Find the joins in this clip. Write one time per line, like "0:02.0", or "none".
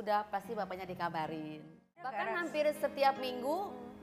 0:02.0